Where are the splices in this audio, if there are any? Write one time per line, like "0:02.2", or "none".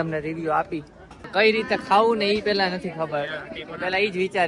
none